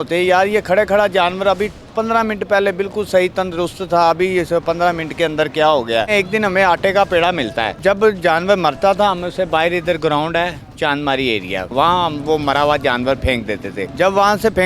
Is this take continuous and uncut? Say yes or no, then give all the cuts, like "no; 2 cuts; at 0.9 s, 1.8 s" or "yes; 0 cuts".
no; 4 cuts; at 6.1 s, 7.8 s, 11.7 s, 13.8 s